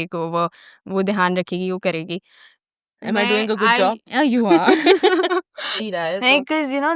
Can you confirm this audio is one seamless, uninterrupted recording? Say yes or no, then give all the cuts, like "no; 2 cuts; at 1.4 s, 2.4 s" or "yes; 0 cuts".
no; 1 cut; at 5.9 s